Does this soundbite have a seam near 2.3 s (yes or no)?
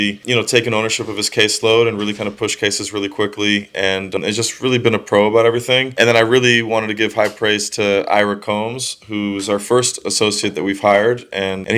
no